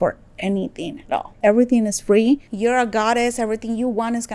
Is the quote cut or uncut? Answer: uncut